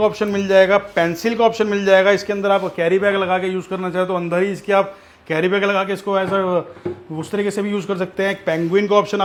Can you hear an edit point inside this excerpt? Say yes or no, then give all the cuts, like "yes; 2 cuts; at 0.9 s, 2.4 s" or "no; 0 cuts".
no; 0 cuts